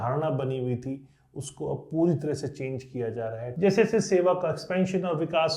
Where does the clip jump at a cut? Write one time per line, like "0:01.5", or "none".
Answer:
0:03.5